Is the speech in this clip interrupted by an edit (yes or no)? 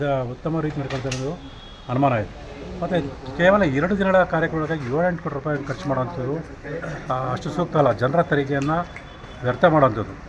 no